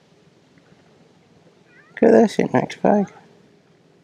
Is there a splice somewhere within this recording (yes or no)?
no